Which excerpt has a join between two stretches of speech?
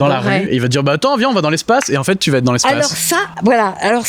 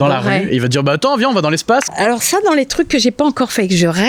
second; 1 cut; at 1.9 s

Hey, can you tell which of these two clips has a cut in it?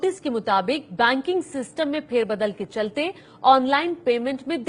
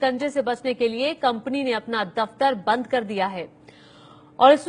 second; 1 cut; at 1.6 s

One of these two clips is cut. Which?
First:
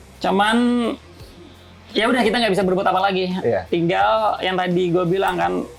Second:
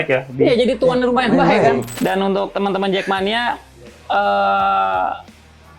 second; 1 cut; at 1.9 s

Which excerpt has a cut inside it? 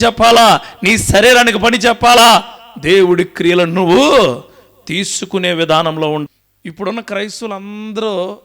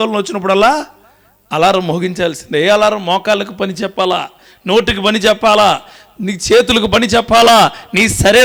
first; 1 cut; at 6.2 s

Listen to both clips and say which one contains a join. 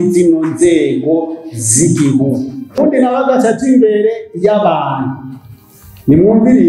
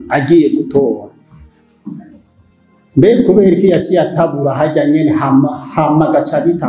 first; 1 cut; at 2.8 s

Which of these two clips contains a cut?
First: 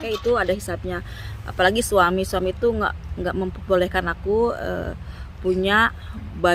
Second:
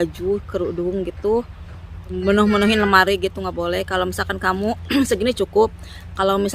second; 1 cut; at 2.2 s

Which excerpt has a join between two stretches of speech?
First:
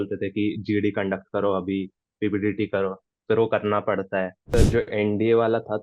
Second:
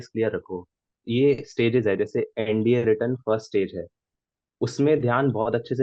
first; 1 cut; at 4.4 s

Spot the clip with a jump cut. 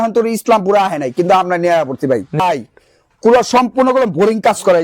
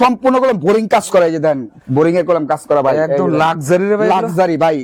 first; 1 cut; at 2.4 s

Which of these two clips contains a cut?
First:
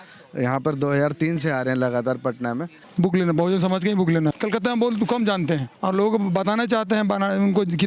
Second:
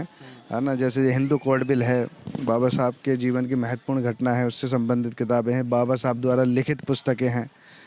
first; 3 cuts; at 2.8 s, 4.4 s, 5.7 s

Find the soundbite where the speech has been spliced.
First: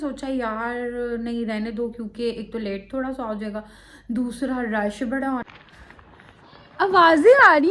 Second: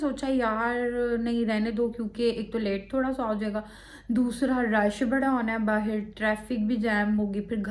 first; 1 cut; at 5.4 s

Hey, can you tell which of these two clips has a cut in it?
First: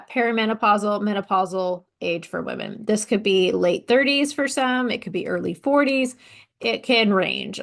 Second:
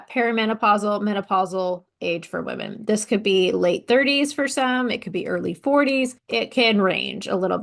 second; 1 cut; at 6.2 s

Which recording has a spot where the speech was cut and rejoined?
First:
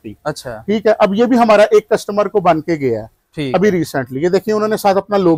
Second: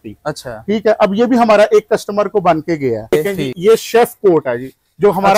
second; 1 cut; at 3.1 s

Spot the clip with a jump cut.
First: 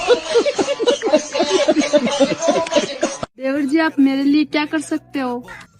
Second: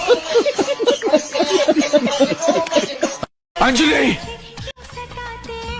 first; 1 cut; at 3.4 s

